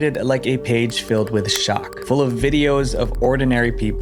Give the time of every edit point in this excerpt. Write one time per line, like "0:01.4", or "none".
none